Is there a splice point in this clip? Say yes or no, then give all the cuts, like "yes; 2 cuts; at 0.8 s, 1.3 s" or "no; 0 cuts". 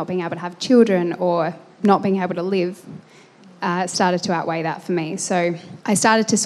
no; 0 cuts